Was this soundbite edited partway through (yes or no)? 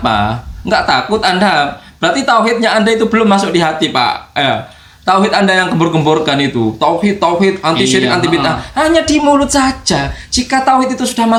no